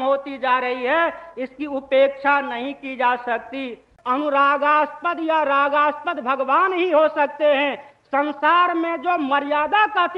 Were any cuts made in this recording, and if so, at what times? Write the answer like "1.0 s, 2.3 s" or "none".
3.9 s